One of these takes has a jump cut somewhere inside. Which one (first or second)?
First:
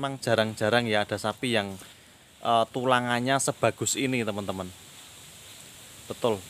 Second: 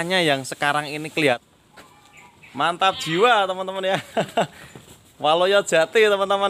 second